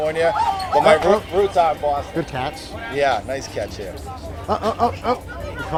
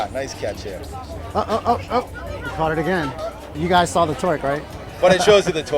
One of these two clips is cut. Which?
second; 1 cut; at 3.6 s

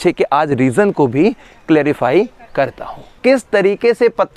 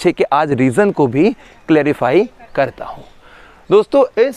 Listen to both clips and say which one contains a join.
first; 1 cut; at 3.1 s

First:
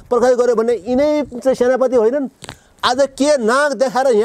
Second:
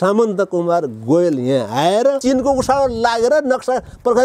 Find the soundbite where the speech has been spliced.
second; 1 cut; at 2.2 s

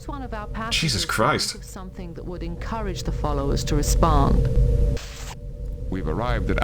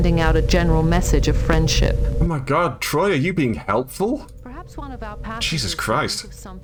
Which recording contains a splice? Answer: first; 1 cut; at 5.0 s

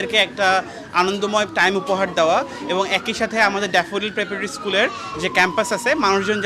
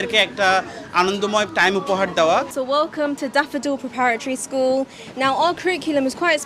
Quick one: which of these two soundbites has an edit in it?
second; 1 cut; at 2.5 s

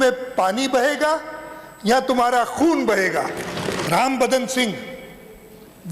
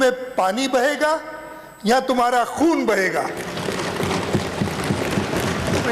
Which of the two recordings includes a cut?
first; 1 cut; at 3.8 s

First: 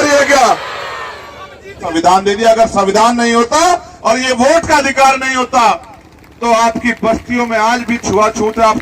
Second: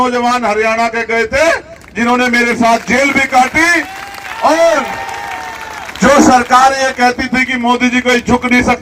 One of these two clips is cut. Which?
first; 1 cut; at 1.9 s

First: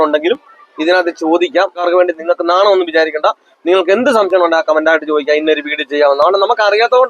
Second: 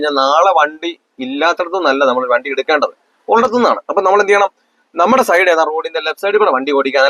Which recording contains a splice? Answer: first; 1 cut; at 1.8 s

